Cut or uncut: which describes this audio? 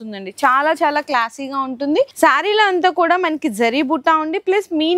cut